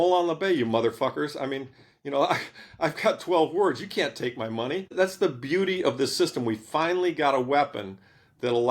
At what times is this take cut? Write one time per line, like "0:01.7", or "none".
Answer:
0:04.9

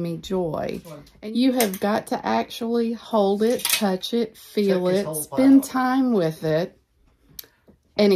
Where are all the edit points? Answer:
0:01.0

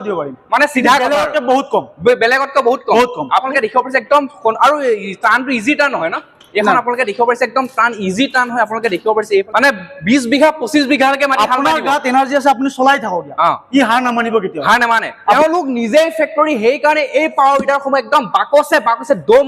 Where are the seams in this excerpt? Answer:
0:03.5
0:09.5
0:15.1

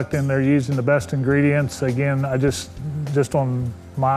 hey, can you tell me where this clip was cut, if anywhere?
none

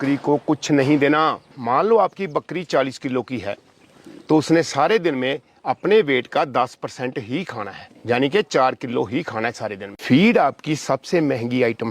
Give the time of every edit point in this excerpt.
0:01.5
0:09.9

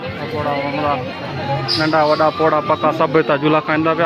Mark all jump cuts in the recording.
none

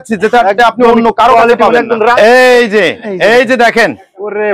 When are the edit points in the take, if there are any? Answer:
0:02.1

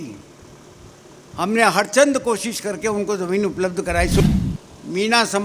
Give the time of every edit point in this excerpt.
0:04.2

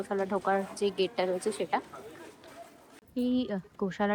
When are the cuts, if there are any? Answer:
0:03.0

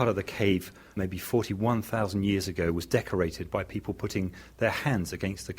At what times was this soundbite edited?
0:00.9

